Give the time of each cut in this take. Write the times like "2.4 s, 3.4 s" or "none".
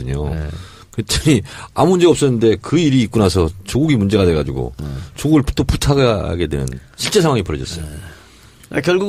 6.8 s